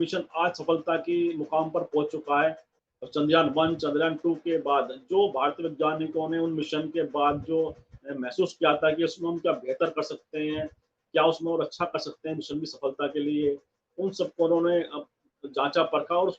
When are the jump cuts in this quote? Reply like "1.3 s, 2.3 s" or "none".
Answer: 2.6 s